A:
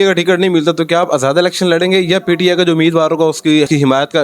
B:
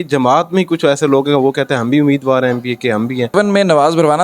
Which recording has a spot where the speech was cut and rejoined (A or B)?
B